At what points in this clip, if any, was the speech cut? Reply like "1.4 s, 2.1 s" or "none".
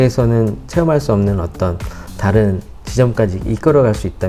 none